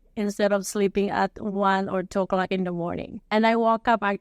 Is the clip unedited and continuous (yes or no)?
no